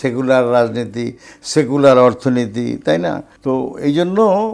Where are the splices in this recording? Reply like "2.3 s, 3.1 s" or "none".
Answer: 3.3 s